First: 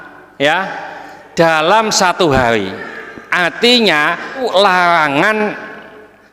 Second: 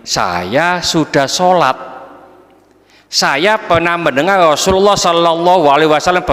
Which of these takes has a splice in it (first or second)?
first